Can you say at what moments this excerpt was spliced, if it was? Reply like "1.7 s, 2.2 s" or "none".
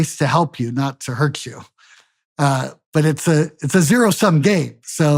none